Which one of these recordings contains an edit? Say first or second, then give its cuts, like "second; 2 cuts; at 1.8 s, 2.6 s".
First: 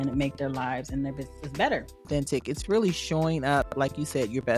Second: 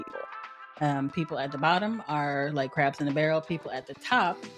first; 1 cut; at 2.0 s